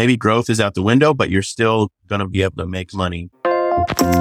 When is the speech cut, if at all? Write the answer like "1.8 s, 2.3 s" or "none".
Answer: 3.2 s